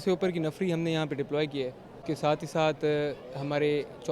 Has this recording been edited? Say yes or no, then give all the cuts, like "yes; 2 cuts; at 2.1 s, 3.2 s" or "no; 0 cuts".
yes; 1 cut; at 1.9 s